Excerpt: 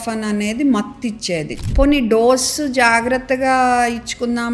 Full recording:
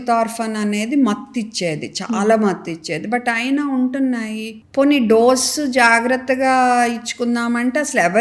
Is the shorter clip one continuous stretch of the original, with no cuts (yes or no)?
no